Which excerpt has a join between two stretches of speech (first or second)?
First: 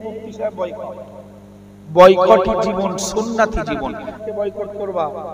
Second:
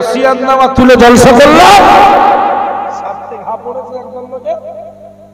first